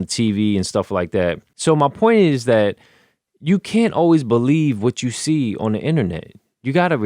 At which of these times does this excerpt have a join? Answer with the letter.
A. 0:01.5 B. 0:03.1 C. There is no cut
A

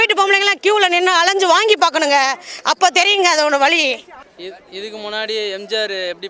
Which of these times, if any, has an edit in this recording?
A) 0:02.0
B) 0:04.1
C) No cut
B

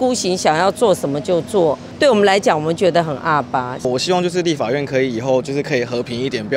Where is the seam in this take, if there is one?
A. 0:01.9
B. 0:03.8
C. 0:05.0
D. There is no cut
B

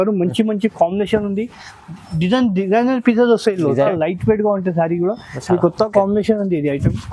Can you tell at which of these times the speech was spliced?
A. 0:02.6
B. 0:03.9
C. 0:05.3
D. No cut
B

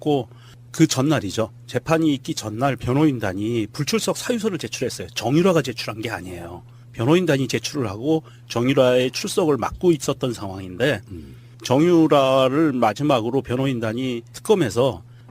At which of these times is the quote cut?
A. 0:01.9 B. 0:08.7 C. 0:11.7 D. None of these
B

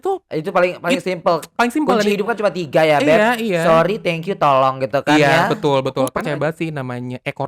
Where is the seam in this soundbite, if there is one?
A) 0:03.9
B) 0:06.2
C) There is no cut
B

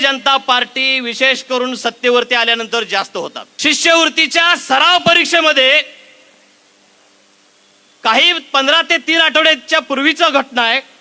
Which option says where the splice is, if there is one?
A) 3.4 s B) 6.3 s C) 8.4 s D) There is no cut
A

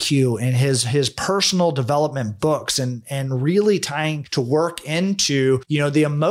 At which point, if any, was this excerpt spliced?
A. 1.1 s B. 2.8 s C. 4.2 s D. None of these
C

